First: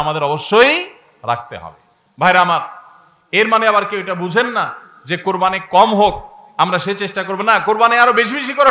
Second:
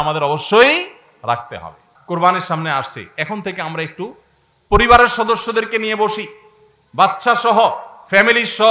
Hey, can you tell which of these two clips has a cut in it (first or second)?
second